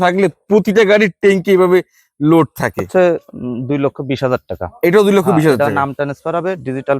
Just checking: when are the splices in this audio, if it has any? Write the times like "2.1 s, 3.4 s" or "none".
2.9 s